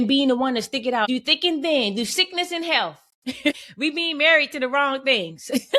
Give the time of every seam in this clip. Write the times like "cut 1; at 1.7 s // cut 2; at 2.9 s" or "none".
cut 1; at 1.1 s // cut 2; at 3.6 s